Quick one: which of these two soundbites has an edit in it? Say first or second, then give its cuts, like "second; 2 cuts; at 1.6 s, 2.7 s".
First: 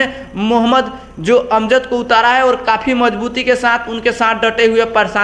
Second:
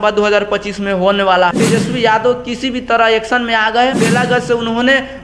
second; 2 cuts; at 1.5 s, 4.0 s